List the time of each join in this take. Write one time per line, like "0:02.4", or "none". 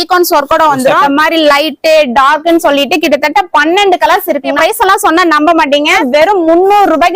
0:01.0
0:04.6
0:06.0